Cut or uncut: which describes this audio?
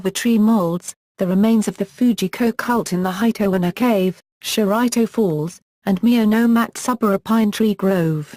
cut